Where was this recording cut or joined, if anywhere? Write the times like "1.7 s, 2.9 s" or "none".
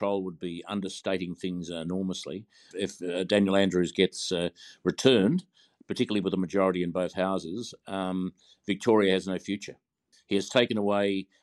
2.7 s, 10.2 s